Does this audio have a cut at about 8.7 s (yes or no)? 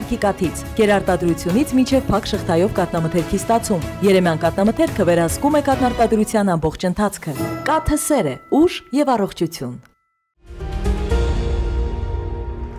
no